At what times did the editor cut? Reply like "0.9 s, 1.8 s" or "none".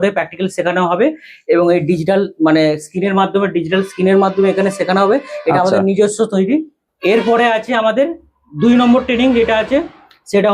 6.8 s